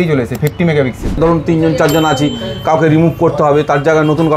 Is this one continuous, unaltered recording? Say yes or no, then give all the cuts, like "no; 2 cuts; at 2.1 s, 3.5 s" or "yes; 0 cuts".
no; 1 cut; at 1.2 s